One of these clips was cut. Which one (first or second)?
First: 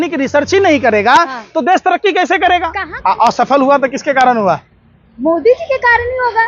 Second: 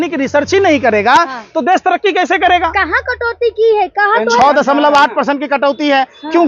first